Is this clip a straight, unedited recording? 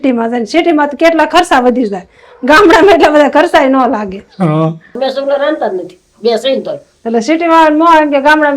no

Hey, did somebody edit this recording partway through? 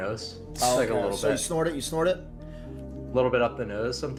no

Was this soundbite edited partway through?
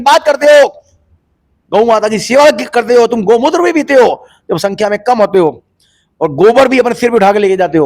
no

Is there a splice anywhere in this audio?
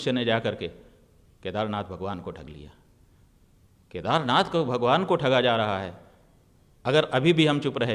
no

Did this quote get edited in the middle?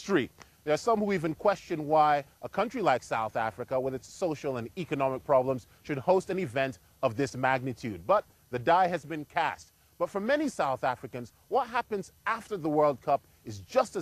no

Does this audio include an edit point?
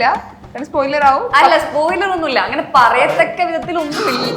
no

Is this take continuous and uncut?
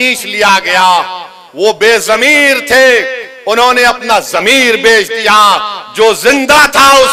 yes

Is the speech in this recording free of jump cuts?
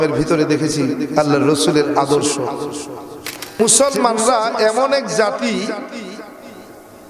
no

